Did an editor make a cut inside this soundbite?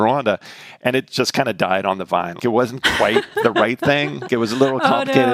yes; 2 cuts; at 2.3 s, 4.3 s

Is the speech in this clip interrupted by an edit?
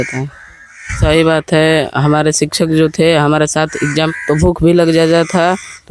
yes; 2 cuts; at 1.0 s, 4.2 s

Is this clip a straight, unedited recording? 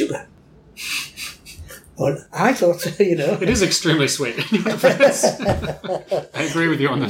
yes; 0 cuts

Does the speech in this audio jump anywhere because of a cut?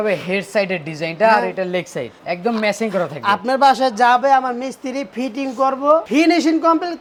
no; 0 cuts

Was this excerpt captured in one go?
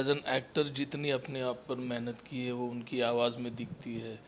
yes; 0 cuts

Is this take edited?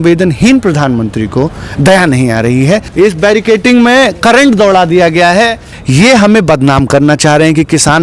yes; 2 cuts; at 2.9 s, 5.7 s

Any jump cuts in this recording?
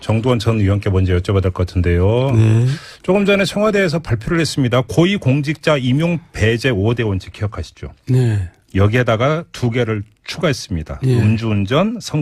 no; 0 cuts

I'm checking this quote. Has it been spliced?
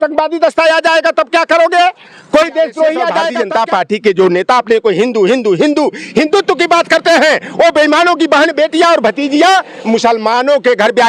yes; 1 cut; at 3.3 s

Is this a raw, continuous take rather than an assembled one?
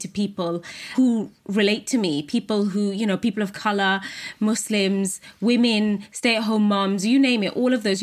no; 1 cut; at 0.9 s

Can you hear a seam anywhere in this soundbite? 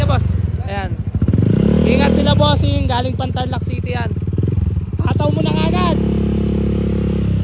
no; 0 cuts

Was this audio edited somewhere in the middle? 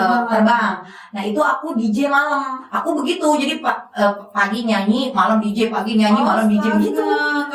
yes; 1 cut; at 2.6 s

